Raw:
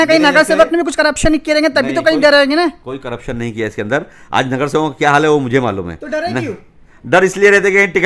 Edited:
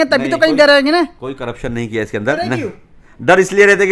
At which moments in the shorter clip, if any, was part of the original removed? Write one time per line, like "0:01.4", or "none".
0:02.4